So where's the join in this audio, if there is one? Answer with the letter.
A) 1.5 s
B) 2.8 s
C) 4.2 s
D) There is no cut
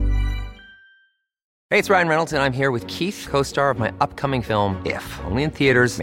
A